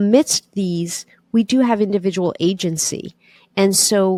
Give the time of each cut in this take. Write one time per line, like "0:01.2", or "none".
none